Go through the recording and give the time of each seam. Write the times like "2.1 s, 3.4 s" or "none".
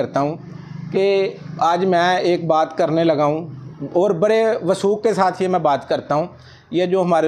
none

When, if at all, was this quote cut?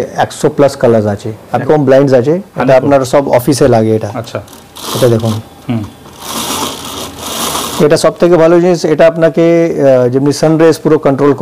1.5 s

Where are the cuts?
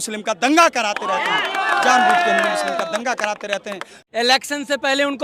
4.0 s

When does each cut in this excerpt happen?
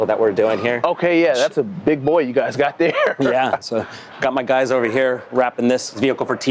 none

